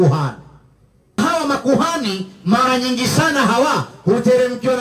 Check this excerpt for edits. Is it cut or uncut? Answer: cut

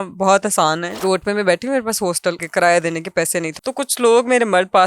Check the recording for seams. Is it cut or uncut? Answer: cut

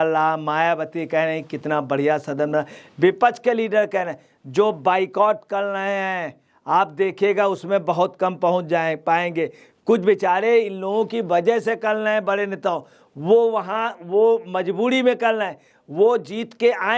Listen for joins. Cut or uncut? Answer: uncut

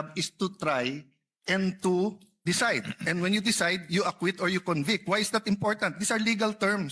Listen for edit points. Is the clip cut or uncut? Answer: cut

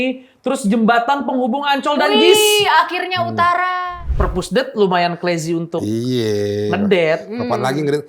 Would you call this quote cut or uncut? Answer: cut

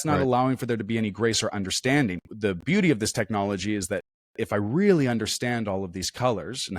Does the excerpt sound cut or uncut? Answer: cut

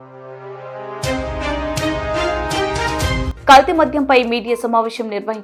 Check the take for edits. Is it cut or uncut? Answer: uncut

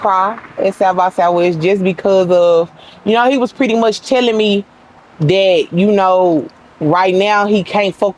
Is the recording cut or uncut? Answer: uncut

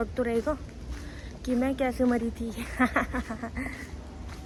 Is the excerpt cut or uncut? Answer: uncut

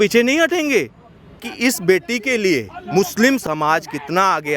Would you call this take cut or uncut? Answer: cut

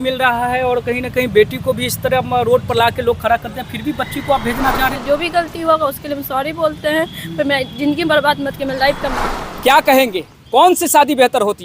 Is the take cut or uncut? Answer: cut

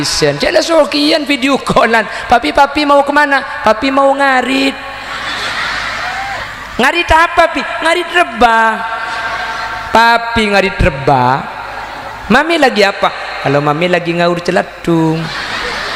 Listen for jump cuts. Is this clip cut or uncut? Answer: uncut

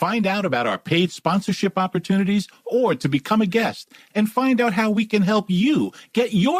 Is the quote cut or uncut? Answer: uncut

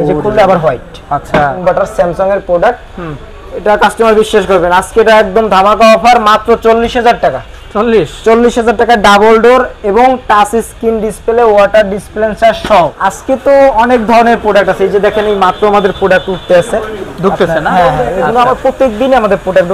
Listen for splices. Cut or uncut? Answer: cut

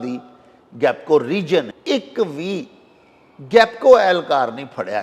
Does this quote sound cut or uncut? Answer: cut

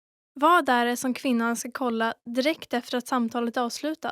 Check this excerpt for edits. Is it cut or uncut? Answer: uncut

